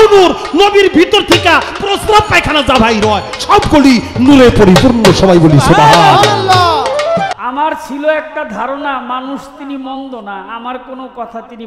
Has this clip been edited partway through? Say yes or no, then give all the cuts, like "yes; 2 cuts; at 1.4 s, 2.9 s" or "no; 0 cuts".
yes; 1 cut; at 7.3 s